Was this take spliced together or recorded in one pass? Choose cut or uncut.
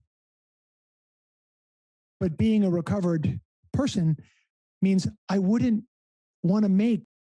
uncut